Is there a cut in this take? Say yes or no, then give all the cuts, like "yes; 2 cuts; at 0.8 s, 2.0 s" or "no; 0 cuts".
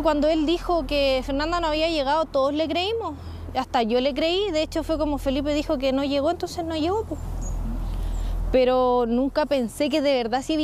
no; 0 cuts